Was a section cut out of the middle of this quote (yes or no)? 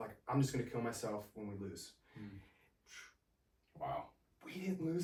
no